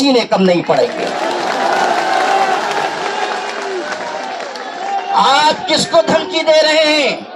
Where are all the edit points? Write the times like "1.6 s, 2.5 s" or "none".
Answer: none